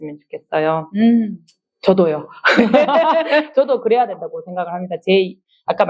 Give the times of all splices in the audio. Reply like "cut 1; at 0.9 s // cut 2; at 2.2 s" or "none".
none

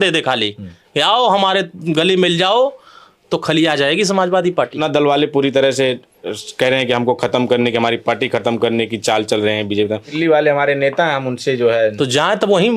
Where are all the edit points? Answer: cut 1; at 4.8 s // cut 2; at 10.1 s

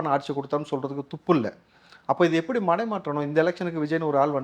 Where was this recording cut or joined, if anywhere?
none

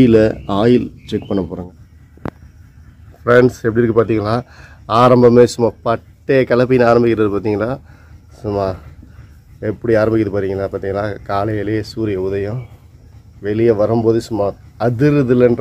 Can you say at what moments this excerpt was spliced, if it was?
cut 1; at 1.6 s

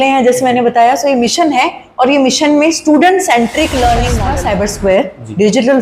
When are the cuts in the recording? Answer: cut 1; at 4.2 s

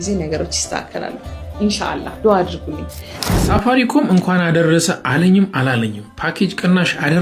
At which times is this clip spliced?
cut 1; at 3.2 s

